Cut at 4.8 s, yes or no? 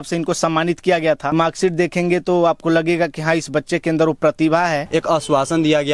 yes